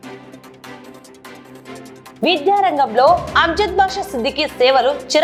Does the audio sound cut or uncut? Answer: uncut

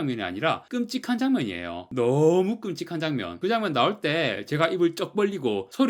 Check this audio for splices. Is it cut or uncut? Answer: uncut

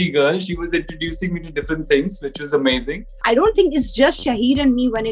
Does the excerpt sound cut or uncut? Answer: cut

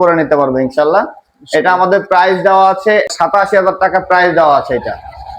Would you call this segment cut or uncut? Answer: cut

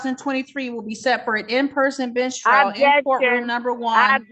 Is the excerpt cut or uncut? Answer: uncut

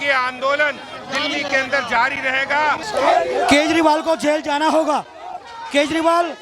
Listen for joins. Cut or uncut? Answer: cut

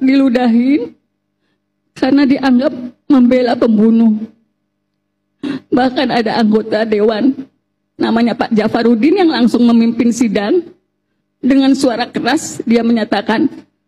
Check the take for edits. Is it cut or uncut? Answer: uncut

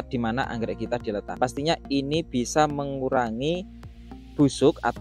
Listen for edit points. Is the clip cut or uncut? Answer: cut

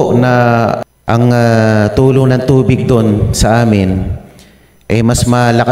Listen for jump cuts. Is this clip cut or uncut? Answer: cut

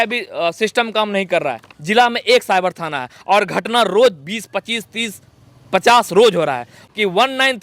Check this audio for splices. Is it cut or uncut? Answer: cut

